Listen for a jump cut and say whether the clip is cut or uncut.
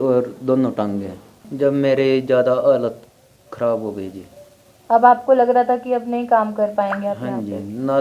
cut